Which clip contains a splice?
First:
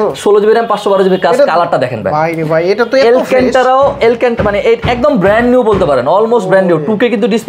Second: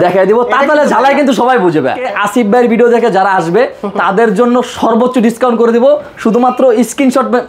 second; 1 cut; at 2.1 s

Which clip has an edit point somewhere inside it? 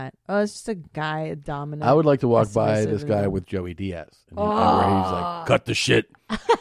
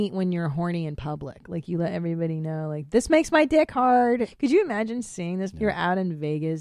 second; 2 cuts; at 4.3 s, 5.5 s

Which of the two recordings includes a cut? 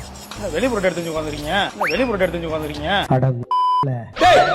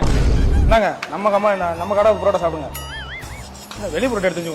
first; 1 cut; at 3.1 s

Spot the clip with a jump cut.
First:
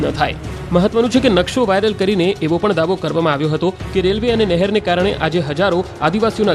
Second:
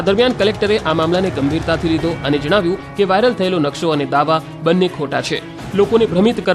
second; 1 cut; at 1.0 s

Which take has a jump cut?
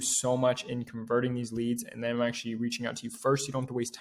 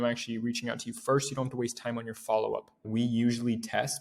second; 1 cut; at 2.9 s

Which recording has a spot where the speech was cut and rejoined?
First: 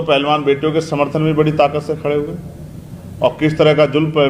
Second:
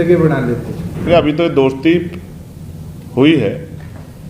second; 1 cut; at 1.1 s

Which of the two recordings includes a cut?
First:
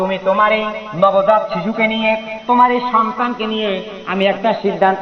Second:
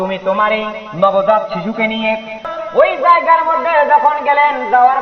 second; 1 cut; at 2.4 s

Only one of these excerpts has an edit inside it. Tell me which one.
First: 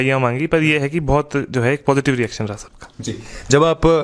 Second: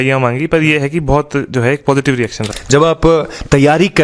second; 1 cut; at 2.5 s

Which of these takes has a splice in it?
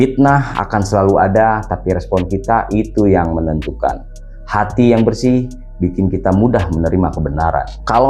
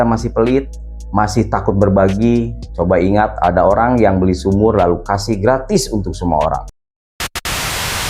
second; 1 cut; at 6.9 s

